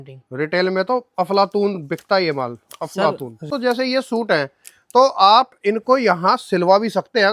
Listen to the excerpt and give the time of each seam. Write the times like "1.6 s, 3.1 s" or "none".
3.5 s